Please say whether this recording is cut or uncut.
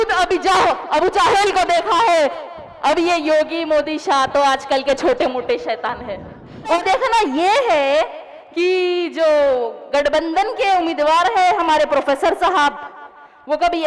cut